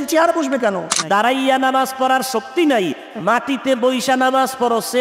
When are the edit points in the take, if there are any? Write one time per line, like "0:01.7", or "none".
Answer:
0:00.9